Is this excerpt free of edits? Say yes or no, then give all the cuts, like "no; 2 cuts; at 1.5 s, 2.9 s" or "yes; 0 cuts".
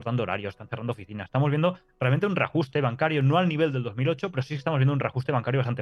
yes; 0 cuts